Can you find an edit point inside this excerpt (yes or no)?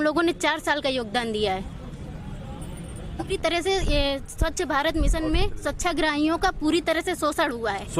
yes